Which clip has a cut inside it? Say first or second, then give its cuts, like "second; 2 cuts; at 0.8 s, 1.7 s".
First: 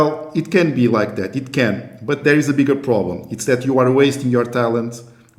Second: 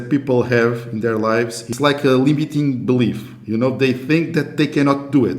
second; 1 cut; at 1.7 s